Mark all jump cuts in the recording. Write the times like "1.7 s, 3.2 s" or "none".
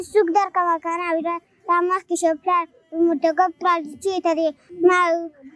4.7 s